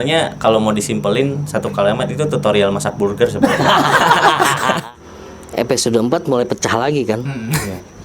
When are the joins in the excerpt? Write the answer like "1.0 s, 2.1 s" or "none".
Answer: 4.8 s